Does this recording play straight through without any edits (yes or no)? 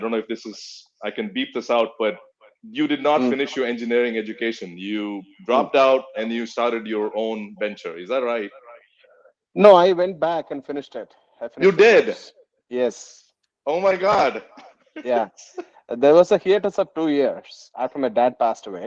yes